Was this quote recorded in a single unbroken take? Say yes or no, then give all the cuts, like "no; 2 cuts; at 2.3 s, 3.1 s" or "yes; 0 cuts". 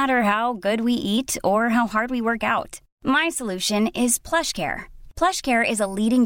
yes; 0 cuts